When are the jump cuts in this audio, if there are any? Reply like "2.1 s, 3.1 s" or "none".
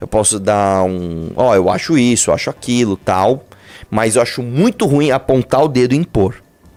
none